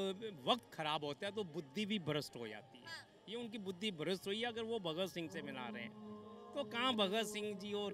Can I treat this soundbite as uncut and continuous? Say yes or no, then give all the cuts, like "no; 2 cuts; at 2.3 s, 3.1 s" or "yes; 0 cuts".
yes; 0 cuts